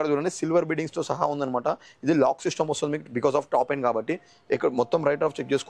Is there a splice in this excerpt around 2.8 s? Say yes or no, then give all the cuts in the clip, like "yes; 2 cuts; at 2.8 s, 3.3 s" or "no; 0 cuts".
no; 0 cuts